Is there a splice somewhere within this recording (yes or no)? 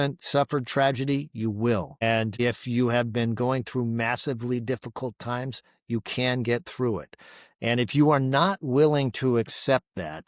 yes